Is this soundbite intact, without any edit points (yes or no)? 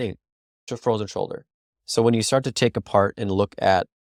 yes